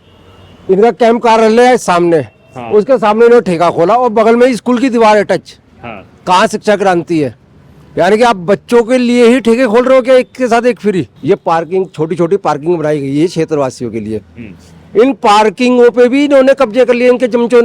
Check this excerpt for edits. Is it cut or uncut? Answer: cut